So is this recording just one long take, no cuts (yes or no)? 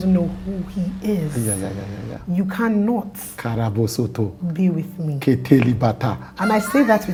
yes